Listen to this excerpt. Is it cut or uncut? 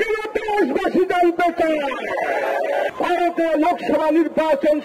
cut